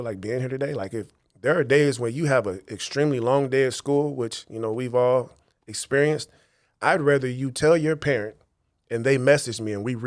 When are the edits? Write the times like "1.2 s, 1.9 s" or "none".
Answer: none